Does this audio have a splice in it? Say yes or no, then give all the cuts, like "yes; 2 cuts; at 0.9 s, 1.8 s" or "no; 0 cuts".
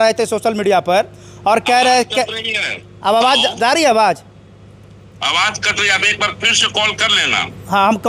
no; 0 cuts